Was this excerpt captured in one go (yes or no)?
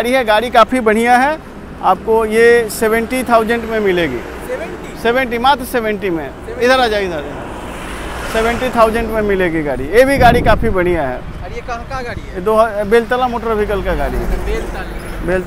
yes